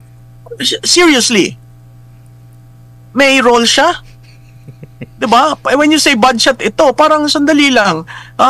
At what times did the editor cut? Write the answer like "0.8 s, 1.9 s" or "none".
none

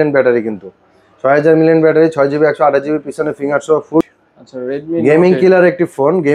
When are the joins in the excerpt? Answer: 4.0 s

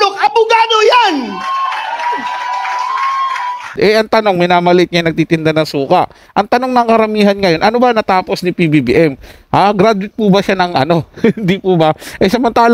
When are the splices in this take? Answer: 3.7 s

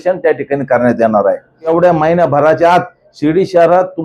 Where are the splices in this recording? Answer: 1.7 s

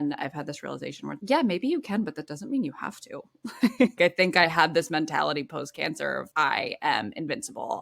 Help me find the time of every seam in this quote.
3.9 s

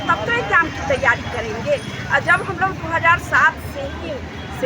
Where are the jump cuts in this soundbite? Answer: none

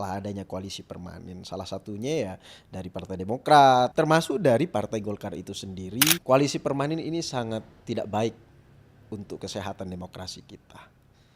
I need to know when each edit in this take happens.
3.9 s, 6.2 s

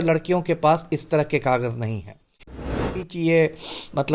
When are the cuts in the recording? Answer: 2.7 s

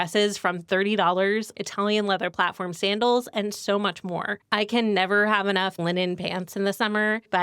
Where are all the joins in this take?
1.5 s, 4.3 s, 5.8 s

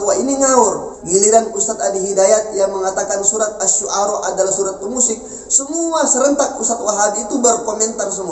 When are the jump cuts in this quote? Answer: 0.9 s

